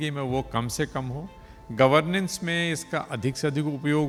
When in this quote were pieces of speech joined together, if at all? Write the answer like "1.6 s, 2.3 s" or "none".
none